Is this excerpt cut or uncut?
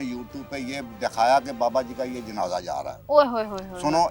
uncut